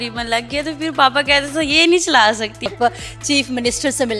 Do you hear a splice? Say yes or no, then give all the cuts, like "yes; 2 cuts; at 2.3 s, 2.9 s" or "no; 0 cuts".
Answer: yes; 1 cut; at 2.7 s